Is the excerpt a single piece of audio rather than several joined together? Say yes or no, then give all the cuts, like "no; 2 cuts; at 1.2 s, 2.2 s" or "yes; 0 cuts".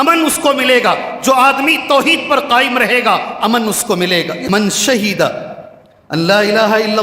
no; 1 cut; at 4.4 s